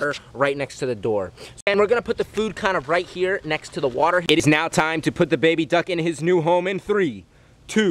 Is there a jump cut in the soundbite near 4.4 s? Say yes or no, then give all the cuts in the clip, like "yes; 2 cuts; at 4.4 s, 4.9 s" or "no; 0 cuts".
yes; 2 cuts; at 1.7 s, 4.4 s